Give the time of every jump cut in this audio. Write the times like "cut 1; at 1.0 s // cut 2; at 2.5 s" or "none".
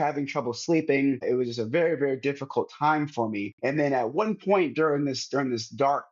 cut 1; at 1.2 s // cut 2; at 3.5 s